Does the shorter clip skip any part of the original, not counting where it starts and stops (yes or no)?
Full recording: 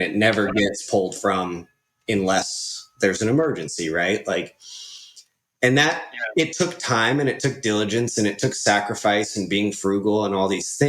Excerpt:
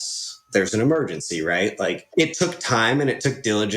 yes